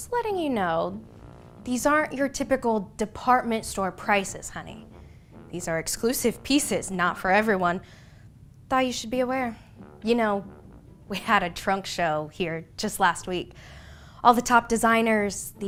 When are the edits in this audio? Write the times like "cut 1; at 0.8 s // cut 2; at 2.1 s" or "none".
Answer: none